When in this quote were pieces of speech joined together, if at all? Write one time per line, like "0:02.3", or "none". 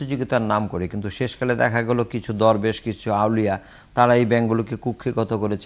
none